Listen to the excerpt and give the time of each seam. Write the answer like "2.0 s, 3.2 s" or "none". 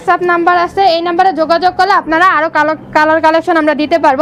none